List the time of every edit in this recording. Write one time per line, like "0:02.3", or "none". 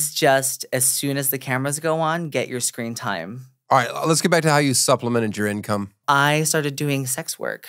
0:03.6